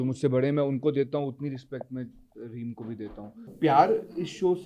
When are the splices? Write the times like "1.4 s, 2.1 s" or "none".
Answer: 3.5 s